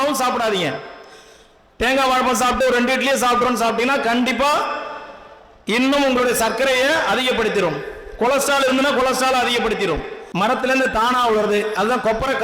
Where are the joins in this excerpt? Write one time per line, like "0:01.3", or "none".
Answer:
0:10.2

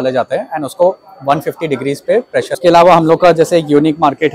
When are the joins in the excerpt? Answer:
0:02.6

